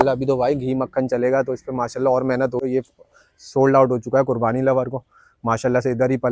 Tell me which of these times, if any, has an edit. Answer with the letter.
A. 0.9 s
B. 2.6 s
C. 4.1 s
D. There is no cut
B